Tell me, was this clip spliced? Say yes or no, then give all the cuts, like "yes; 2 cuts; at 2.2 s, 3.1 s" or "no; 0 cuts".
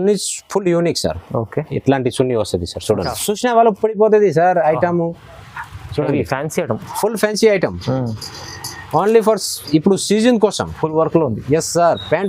yes; 1 cut; at 3.1 s